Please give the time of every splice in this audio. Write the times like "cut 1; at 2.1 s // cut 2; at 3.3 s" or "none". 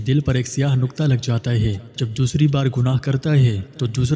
cut 1; at 1.9 s